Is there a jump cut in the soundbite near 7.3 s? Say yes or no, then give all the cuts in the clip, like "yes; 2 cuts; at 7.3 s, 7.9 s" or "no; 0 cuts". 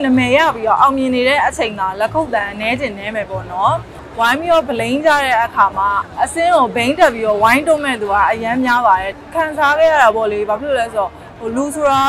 no; 3 cuts; at 4.0 s, 6.0 s, 9.2 s